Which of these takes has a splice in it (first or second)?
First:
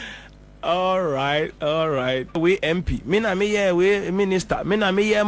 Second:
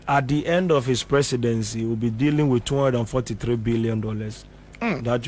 first